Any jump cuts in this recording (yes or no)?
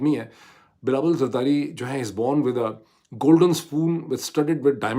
no